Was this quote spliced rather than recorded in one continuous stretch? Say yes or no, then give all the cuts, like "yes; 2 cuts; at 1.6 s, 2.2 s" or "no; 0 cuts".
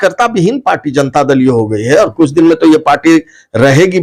no; 0 cuts